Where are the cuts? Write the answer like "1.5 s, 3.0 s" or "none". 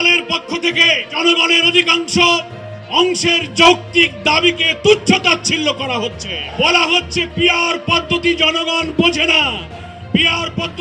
1.2 s, 6.4 s